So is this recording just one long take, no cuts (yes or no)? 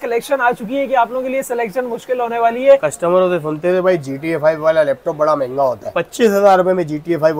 no